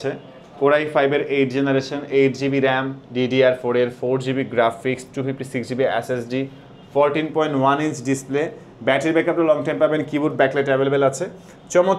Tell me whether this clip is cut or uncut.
uncut